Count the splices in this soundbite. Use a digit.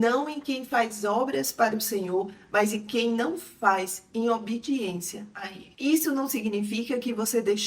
1